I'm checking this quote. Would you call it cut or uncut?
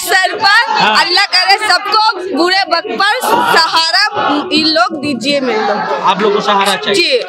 uncut